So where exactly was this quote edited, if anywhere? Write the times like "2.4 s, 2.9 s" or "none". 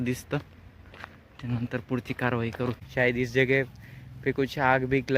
2.8 s